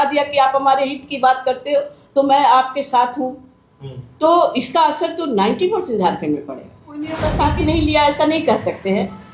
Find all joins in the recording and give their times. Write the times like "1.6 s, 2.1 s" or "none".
7.1 s